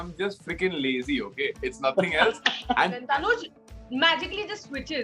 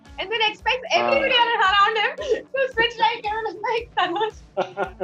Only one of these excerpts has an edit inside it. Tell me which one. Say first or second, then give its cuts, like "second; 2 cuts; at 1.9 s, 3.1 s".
first; 1 cut; at 3.0 s